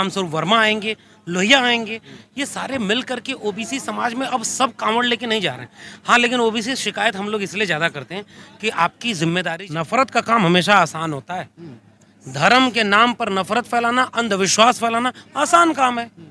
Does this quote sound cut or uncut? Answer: cut